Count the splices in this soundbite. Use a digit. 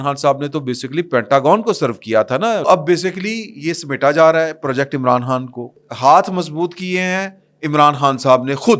2